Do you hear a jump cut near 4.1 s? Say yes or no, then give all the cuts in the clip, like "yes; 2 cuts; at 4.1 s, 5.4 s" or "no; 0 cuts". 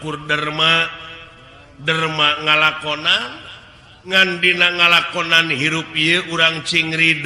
yes; 1 cut; at 4.1 s